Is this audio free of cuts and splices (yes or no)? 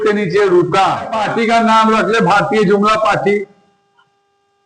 no